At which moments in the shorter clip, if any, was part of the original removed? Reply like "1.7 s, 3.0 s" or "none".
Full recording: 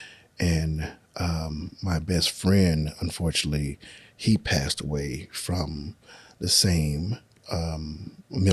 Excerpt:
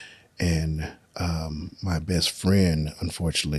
none